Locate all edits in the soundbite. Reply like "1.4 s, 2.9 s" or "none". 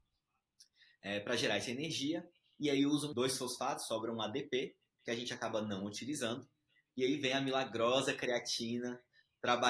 3.1 s